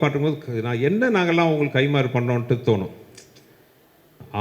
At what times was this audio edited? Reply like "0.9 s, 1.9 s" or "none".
none